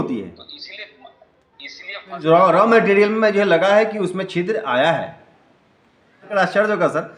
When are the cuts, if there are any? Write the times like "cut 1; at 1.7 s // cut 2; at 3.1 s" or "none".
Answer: cut 1; at 2.1 s // cut 2; at 6.3 s